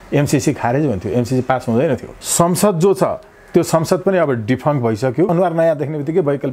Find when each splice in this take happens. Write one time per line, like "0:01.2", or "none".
0:02.2
0:05.3